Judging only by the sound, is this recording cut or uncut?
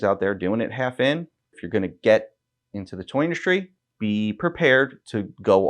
cut